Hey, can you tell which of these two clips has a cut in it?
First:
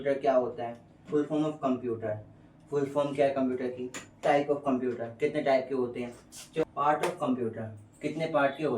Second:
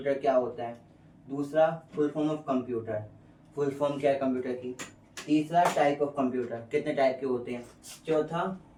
first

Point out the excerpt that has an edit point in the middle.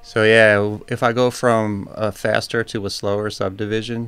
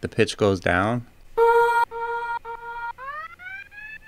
second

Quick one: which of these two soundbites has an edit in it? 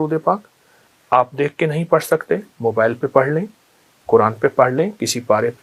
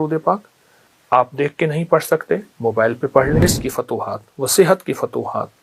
second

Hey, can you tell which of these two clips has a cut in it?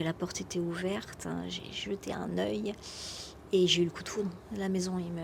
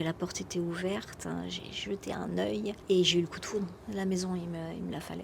second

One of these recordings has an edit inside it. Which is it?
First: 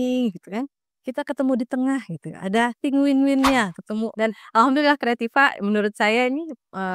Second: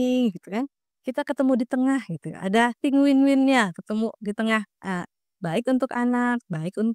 first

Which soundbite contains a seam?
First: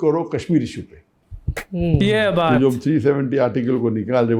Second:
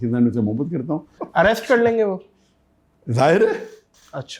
second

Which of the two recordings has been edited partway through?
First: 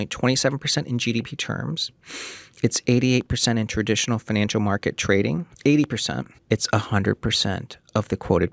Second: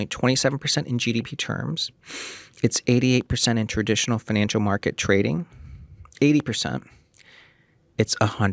first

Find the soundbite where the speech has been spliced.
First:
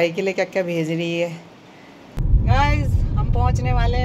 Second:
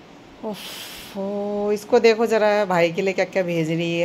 first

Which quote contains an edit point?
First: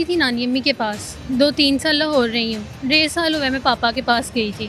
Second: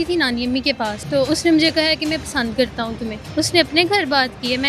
second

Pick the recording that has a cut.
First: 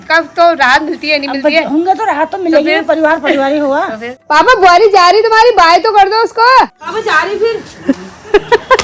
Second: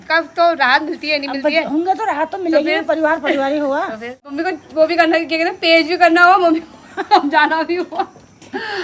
first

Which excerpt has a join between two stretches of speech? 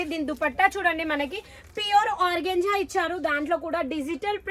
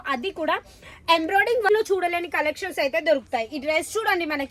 second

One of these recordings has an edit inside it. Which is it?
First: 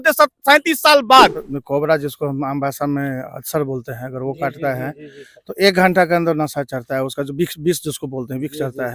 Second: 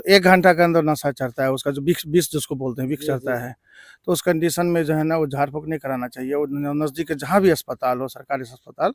first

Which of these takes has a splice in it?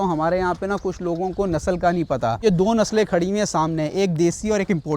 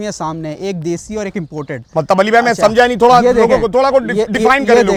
first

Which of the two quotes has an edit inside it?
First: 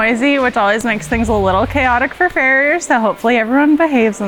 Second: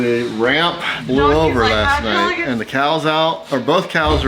second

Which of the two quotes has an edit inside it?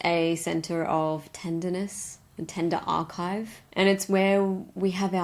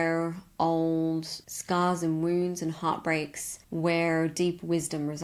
first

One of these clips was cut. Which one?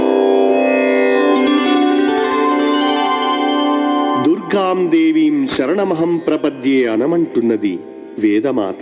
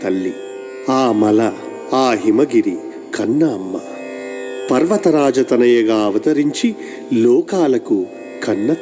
first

